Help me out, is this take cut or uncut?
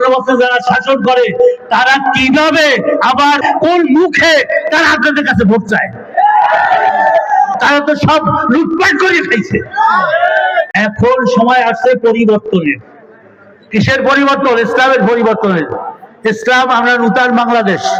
uncut